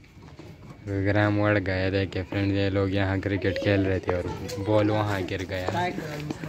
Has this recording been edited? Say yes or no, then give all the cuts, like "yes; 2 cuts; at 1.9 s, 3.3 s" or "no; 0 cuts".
no; 0 cuts